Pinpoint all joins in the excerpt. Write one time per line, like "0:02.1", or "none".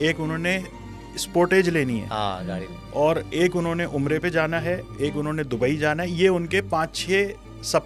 none